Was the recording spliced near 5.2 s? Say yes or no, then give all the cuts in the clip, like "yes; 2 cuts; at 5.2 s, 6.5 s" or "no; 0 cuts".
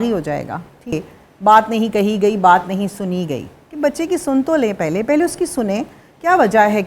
no; 1 cut; at 0.9 s